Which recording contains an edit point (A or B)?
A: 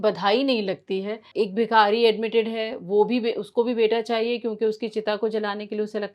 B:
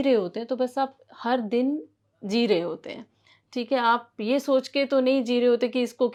A